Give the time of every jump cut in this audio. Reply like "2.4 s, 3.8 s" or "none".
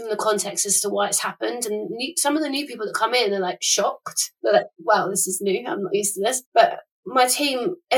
4.3 s